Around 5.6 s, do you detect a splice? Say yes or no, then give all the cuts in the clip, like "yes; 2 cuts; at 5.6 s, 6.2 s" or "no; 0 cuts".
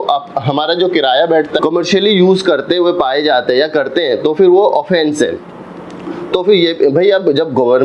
no; 1 cut; at 1.5 s